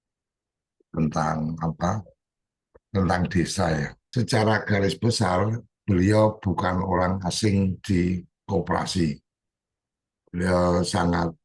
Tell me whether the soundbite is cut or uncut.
cut